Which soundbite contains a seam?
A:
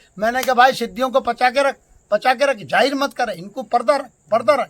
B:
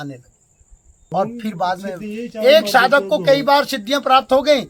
B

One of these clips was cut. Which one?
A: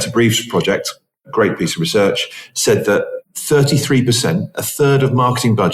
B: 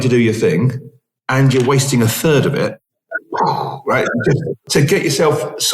B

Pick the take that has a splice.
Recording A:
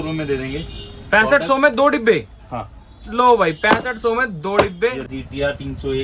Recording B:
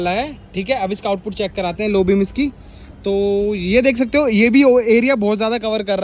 A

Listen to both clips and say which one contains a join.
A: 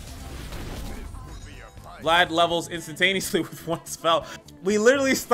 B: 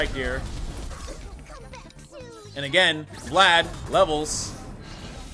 A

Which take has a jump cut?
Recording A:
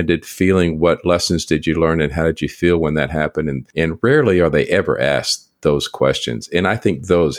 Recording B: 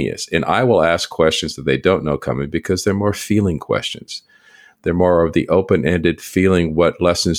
A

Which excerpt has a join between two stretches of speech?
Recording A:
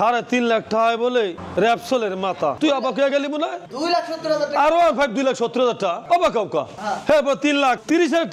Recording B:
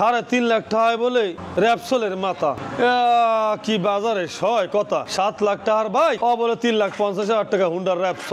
A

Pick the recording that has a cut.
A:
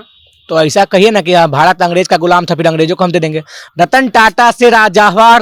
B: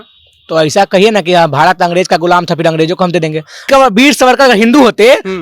B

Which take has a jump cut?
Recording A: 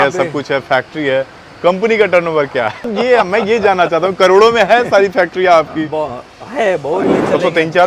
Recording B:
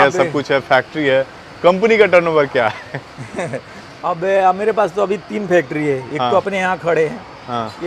A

